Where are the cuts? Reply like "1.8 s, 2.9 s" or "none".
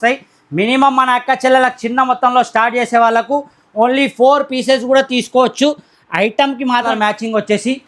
6.9 s